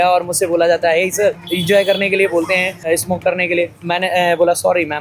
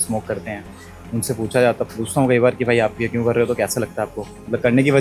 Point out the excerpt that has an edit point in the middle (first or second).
first